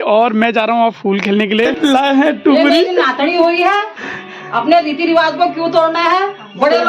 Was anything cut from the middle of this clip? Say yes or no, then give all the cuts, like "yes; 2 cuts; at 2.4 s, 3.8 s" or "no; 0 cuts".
yes; 1 cut; at 1.7 s